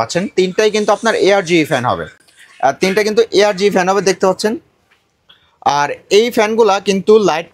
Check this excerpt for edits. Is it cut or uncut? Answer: uncut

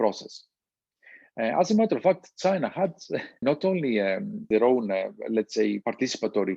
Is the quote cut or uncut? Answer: cut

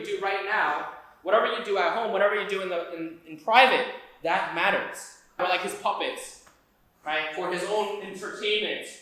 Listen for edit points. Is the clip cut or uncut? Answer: cut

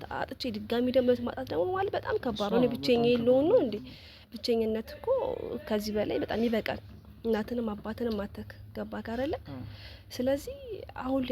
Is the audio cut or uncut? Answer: uncut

